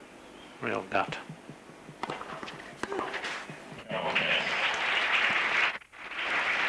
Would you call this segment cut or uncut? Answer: cut